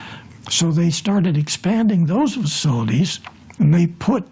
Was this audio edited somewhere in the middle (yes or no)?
yes